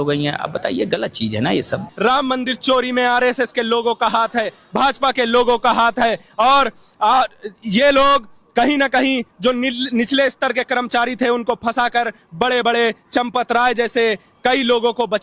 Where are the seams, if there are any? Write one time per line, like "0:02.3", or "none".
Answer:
0:01.9

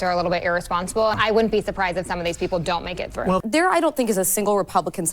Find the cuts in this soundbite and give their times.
0:01.2
0:03.4

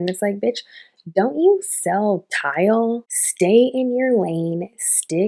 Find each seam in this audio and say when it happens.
0:03.0

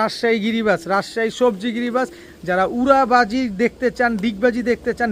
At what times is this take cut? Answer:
none

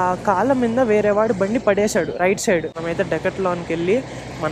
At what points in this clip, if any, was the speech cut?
0:02.7

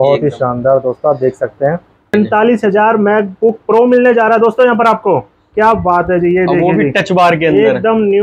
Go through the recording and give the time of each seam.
0:02.1

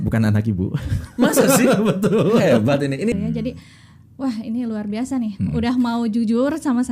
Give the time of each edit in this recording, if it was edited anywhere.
0:03.1

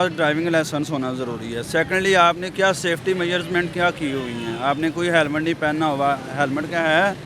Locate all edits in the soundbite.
none

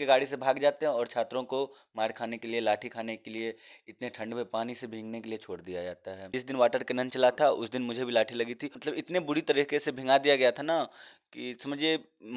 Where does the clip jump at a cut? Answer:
0:06.4
0:08.7

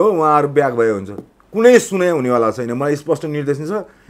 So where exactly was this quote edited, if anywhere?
none

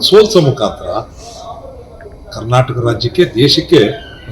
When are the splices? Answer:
none

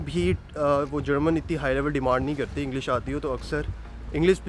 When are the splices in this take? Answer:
none

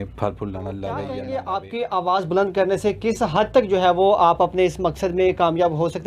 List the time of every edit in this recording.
0:01.1

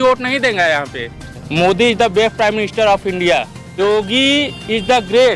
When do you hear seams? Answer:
0:01.4
0:03.8

